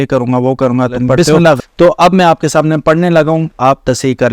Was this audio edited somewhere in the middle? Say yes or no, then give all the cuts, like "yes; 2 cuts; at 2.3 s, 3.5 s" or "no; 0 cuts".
yes; 1 cut; at 1.6 s